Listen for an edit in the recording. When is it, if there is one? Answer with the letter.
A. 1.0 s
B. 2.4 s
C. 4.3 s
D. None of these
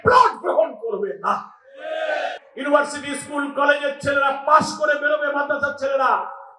B